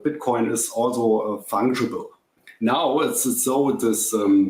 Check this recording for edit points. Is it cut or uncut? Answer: cut